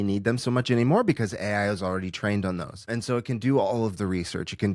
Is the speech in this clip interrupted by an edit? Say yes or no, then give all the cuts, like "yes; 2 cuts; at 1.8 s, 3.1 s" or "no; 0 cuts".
yes; 1 cut; at 2.9 s